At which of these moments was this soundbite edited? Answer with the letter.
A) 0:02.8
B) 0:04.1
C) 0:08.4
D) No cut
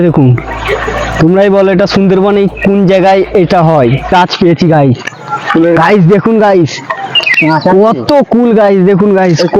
B